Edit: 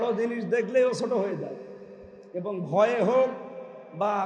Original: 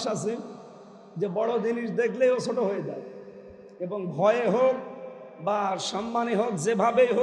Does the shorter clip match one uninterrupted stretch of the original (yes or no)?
yes